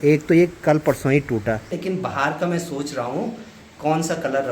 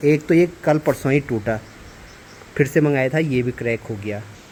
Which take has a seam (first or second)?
first